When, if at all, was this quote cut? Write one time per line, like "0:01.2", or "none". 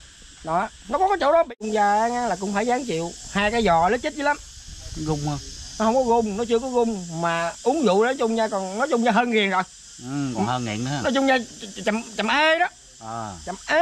0:01.6